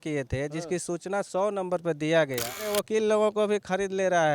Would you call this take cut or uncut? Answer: cut